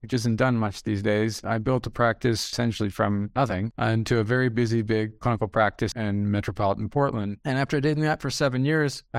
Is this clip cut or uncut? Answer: cut